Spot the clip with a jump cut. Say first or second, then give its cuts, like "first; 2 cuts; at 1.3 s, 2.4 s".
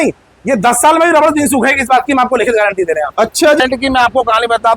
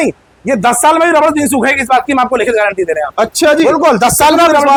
first; 1 cut; at 3.6 s